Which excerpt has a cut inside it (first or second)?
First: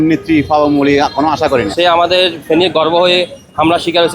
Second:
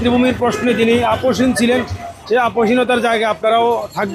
first